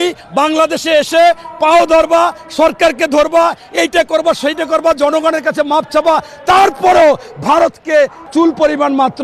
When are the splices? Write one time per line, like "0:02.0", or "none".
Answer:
0:08.2